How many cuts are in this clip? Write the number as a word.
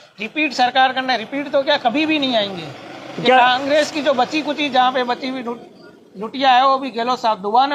zero